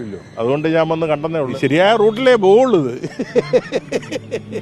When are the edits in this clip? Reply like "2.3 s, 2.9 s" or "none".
1.5 s